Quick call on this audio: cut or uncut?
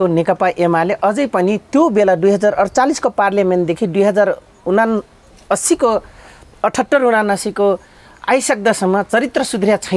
uncut